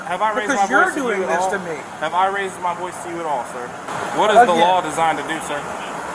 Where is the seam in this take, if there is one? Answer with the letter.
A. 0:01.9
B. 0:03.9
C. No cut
B